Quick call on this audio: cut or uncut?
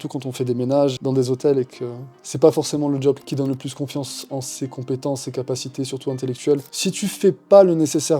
cut